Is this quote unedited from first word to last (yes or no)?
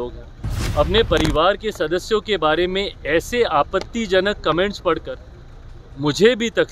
yes